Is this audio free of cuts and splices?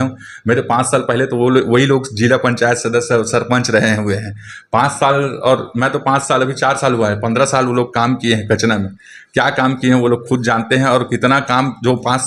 yes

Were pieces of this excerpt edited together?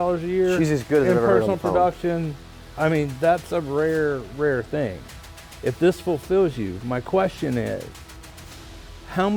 no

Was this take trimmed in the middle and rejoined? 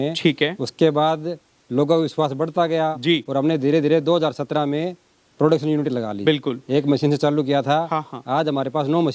no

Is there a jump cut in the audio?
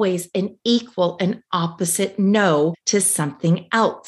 no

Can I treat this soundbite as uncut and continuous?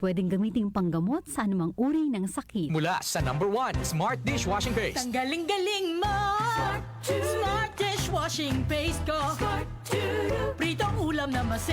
no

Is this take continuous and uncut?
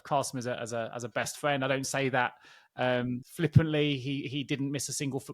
yes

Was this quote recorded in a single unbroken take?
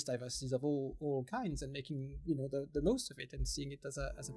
yes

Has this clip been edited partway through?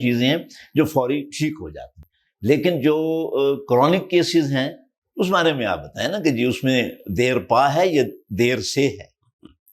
no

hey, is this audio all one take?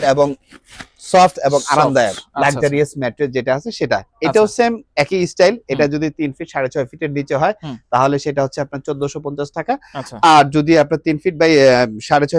yes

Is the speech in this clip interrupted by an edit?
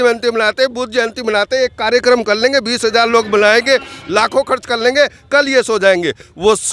no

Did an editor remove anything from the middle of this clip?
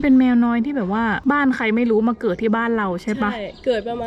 no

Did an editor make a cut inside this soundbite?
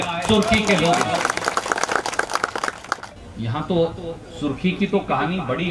yes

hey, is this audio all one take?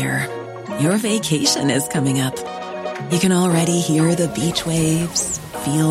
yes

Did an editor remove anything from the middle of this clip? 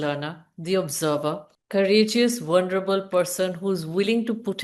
yes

